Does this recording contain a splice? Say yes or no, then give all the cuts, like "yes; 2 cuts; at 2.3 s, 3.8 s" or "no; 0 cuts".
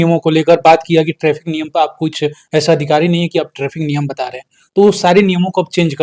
no; 0 cuts